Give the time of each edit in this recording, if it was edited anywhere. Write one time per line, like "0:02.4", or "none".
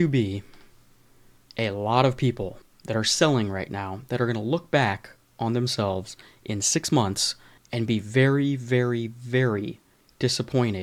none